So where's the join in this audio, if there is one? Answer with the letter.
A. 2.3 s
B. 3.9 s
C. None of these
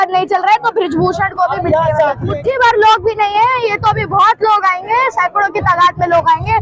A